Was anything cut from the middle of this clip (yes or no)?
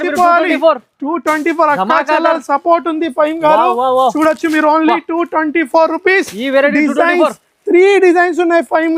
no